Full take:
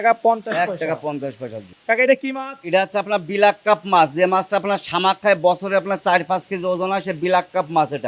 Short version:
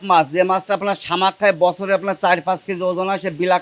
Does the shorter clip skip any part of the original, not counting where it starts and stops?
no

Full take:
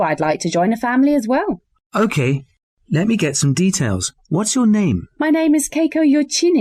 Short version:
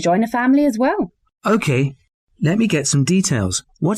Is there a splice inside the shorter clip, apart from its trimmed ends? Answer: no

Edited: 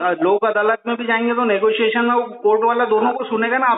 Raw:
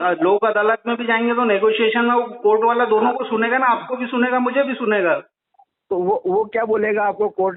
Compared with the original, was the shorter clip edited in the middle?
no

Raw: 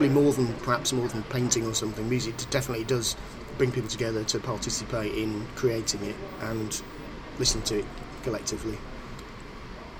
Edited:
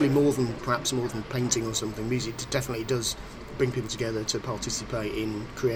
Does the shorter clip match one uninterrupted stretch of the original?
yes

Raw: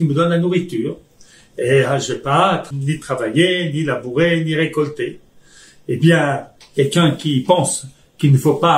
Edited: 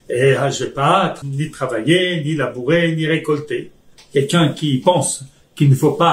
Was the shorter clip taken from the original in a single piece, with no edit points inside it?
no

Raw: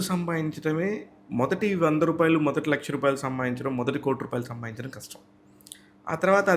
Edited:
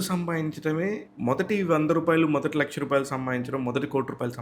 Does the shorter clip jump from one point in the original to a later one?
yes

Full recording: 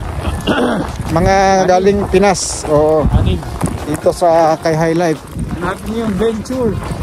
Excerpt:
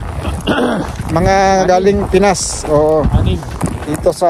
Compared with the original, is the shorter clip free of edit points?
yes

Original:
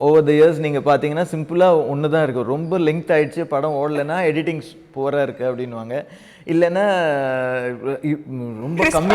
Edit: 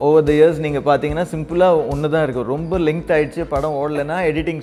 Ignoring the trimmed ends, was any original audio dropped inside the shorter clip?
no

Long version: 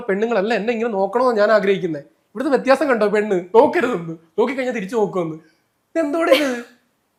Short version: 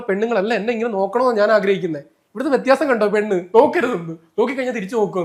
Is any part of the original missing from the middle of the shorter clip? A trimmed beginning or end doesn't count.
no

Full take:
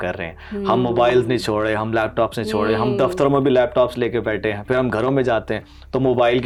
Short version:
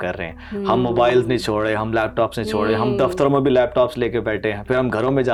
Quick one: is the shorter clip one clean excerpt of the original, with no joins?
yes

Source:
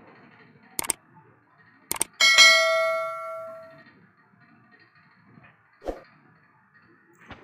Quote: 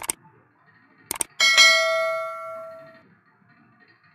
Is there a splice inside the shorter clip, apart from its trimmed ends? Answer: yes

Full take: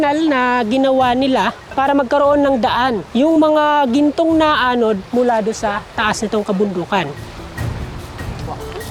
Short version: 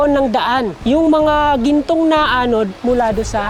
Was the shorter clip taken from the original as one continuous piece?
yes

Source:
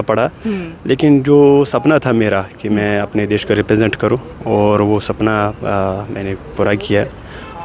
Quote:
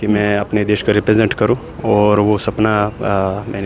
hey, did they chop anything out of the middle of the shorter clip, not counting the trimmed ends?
no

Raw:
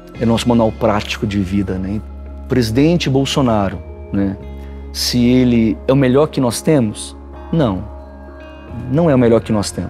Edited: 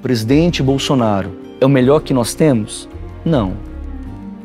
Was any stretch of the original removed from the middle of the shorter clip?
yes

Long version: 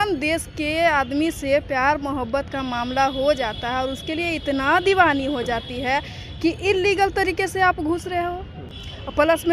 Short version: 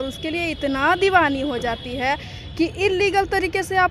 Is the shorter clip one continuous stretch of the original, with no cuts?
yes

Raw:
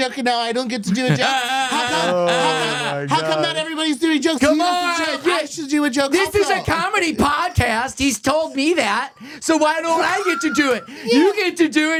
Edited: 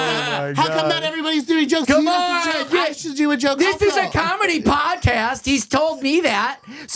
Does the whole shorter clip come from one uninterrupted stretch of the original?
yes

